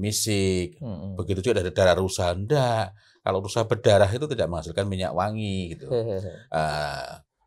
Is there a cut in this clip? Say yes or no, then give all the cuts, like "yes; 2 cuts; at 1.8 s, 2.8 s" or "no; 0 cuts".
no; 0 cuts